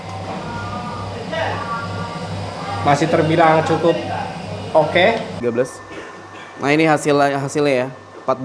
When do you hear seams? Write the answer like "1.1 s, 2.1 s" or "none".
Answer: 5.4 s